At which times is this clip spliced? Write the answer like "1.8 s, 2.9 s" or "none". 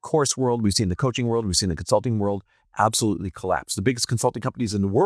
none

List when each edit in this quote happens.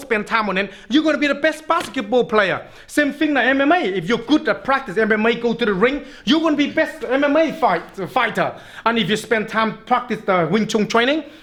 none

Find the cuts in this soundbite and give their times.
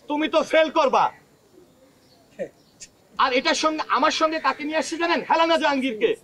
none

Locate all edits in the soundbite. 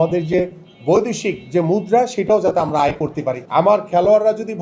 3.4 s

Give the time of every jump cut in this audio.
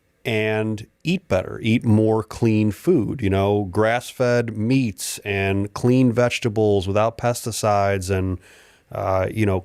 none

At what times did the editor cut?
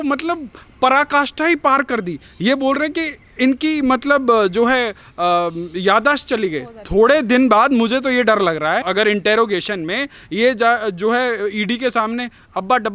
none

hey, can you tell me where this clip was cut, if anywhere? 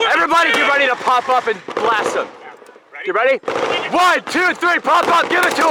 none

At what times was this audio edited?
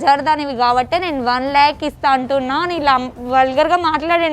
none

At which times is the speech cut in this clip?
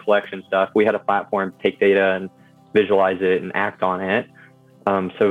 none

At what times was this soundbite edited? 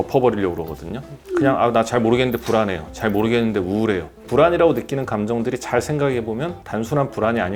none

